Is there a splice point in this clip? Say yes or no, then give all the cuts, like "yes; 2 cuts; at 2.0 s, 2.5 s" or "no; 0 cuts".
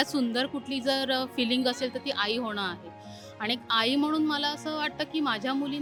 no; 0 cuts